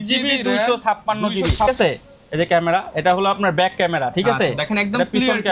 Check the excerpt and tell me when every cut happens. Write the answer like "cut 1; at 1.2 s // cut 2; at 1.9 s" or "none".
cut 1; at 1.7 s